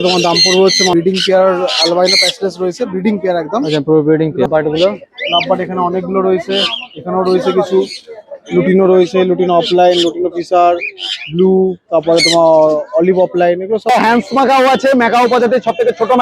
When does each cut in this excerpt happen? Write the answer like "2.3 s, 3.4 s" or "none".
0.9 s, 4.5 s, 13.9 s